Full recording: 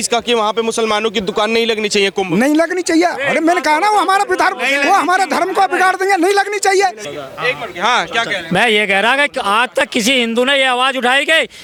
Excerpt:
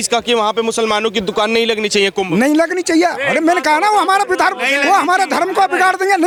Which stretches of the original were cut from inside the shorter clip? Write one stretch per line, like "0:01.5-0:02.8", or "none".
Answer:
none